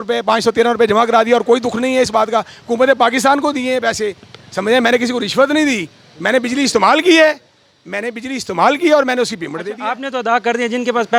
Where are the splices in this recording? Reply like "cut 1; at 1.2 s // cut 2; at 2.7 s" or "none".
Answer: none